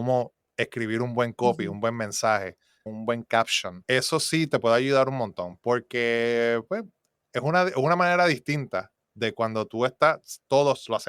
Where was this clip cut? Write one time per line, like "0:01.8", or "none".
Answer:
none